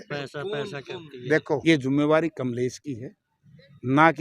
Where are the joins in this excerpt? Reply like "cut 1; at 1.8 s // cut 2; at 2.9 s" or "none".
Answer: cut 1; at 1.6 s